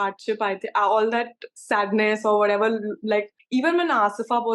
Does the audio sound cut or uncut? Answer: cut